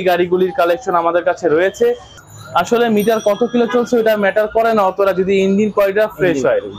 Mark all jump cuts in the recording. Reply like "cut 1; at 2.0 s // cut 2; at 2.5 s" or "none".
cut 1; at 2.2 s